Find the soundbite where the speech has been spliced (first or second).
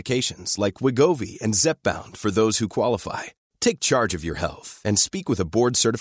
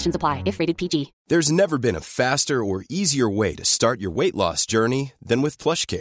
second